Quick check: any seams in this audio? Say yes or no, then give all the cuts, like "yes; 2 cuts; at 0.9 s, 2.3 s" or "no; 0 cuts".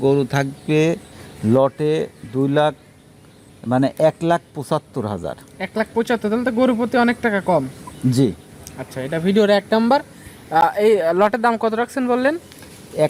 no; 0 cuts